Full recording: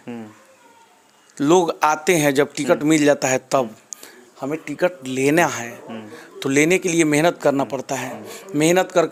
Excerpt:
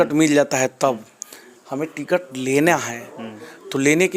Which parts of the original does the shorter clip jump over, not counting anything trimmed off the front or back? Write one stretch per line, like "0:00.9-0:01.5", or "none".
none